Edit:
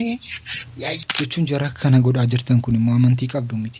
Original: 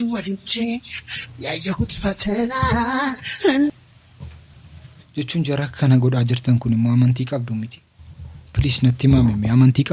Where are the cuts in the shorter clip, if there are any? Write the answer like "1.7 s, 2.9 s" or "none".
1.0 s